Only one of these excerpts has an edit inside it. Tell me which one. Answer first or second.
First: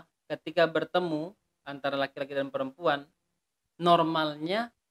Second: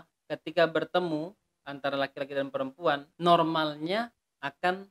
second